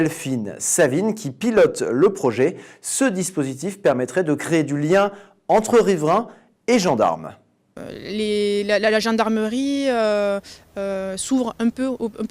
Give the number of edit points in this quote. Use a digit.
1